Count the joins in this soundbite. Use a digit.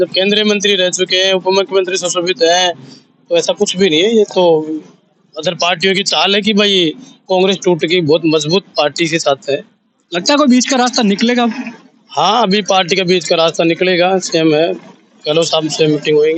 0